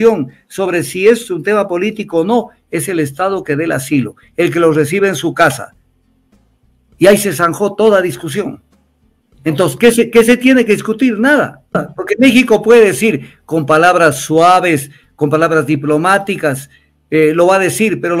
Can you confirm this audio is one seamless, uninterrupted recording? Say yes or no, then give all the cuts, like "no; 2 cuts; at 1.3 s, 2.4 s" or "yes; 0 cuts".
no; 1 cut; at 11.8 s